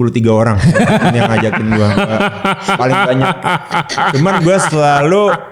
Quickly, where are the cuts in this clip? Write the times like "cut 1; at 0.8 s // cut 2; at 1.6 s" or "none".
none